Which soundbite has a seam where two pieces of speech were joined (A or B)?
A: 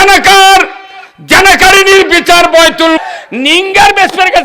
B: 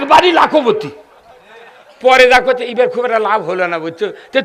A